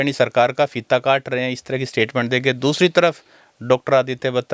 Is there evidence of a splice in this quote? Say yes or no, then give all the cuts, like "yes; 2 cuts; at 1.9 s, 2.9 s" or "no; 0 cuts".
no; 0 cuts